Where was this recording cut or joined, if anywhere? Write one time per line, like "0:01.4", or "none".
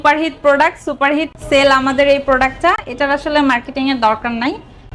none

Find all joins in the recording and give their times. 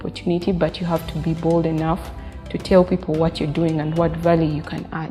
none

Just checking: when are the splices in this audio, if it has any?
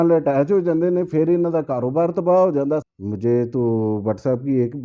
0:02.9

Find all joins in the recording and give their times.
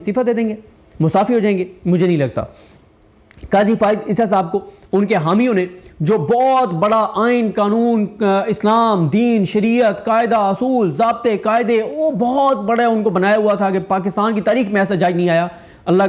none

